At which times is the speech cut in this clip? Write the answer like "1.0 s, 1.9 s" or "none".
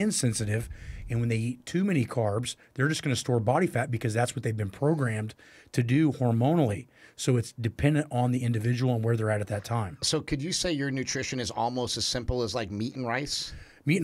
none